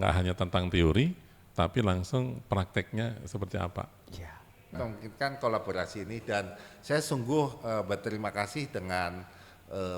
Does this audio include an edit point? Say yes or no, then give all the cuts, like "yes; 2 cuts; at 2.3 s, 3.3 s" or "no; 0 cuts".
yes; 1 cut; at 4.8 s